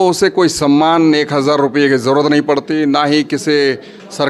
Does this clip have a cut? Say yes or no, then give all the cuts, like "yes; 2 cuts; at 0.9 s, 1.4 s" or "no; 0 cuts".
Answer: no; 0 cuts